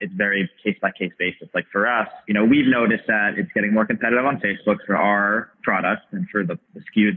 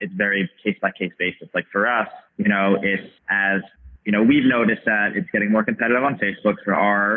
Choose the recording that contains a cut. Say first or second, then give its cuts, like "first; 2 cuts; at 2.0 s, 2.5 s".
first; 1 cut; at 2.2 s